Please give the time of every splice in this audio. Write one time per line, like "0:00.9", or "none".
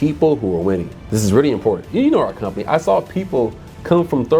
0:01.0
0:01.9